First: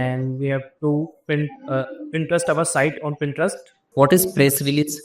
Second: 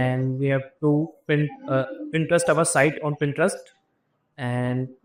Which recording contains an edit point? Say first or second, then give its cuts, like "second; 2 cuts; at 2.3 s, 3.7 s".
first; 1 cut; at 3.7 s